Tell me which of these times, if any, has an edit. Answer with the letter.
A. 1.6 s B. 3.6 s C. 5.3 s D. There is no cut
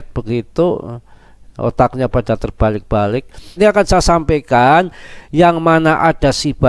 B